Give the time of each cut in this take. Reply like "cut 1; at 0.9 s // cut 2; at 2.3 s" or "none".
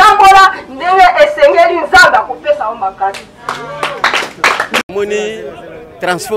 cut 1; at 4.9 s